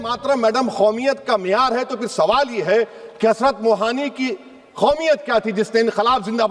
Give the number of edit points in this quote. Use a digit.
0